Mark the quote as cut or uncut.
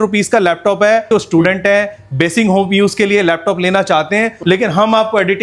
cut